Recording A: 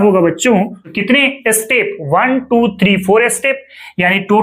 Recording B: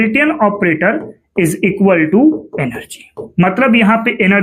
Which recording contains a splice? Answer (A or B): A